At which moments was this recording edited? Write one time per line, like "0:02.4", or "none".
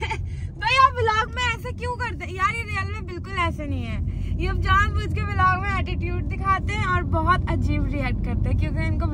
none